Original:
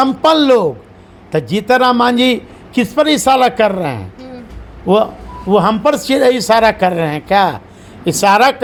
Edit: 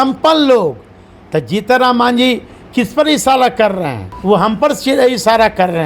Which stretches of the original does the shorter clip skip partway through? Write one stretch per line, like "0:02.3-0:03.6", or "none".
0:04.1-0:05.3